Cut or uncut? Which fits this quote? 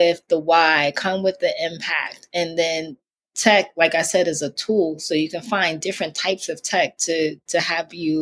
uncut